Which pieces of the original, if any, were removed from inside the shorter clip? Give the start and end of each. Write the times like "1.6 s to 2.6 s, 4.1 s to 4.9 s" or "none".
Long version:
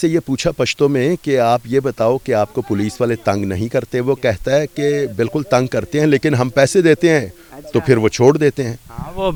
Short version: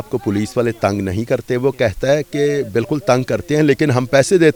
none

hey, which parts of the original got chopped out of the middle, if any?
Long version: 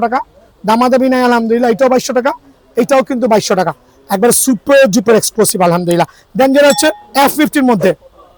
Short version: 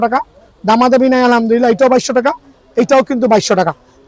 none

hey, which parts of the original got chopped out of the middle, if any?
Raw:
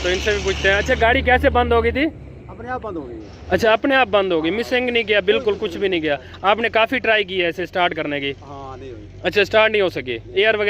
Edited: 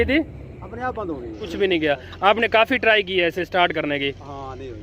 3.3 s to 5.7 s

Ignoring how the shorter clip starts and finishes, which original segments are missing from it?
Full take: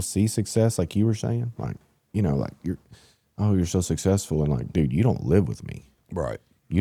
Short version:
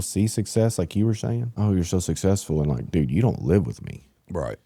1.5 s to 3.3 s

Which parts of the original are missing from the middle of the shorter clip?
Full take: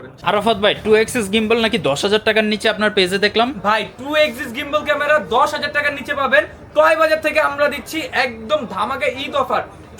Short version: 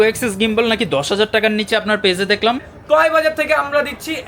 3.6 s to 6.5 s

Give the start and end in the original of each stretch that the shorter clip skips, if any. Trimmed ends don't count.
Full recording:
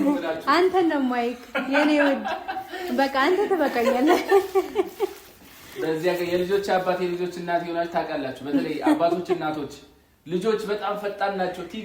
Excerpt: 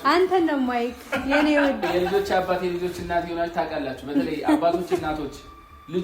2.3 s to 6.2 s

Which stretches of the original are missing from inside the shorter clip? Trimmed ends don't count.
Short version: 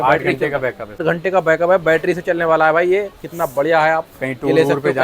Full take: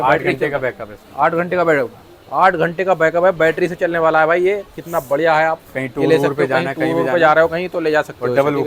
1.0 s to 2.5 s

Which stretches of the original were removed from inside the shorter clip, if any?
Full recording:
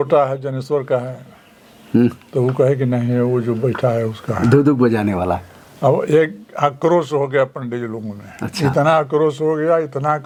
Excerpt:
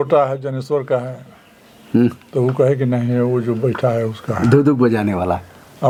none

